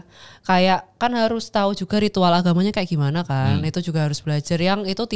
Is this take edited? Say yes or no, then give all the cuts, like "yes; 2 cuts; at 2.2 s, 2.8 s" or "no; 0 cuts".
no; 0 cuts